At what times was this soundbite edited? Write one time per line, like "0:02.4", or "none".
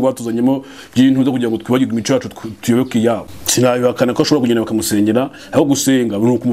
0:03.4